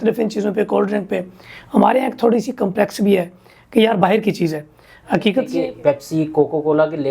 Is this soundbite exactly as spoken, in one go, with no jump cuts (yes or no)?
no